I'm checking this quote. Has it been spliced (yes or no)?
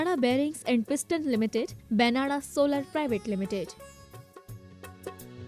yes